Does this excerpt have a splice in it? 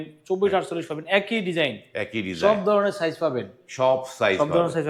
no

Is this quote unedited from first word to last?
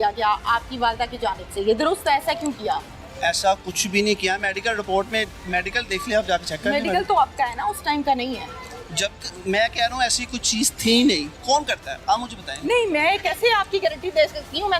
yes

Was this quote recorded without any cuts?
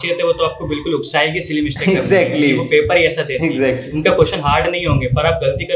yes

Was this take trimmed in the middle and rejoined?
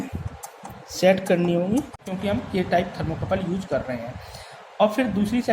yes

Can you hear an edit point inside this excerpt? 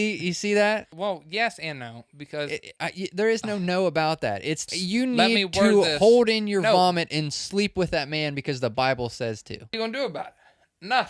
yes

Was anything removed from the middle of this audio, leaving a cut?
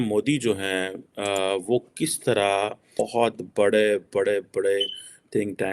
yes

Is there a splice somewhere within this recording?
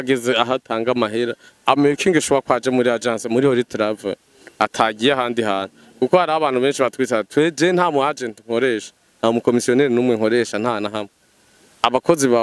no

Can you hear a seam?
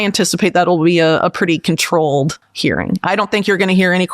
yes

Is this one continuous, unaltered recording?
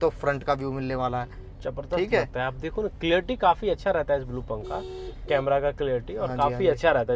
yes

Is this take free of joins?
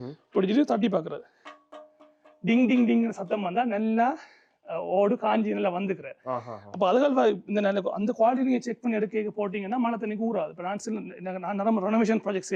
yes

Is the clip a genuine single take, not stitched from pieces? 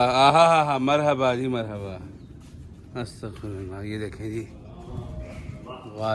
yes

